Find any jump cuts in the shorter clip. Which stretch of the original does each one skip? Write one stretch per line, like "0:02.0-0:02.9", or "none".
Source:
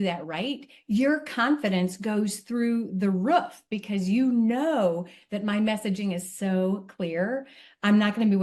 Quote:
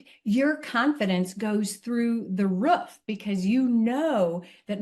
none